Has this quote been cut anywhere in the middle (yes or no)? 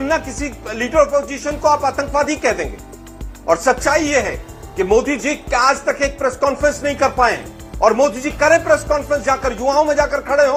no